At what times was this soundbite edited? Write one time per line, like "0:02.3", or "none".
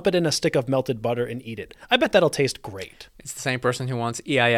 none